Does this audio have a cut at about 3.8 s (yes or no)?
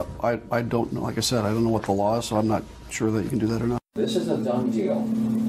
yes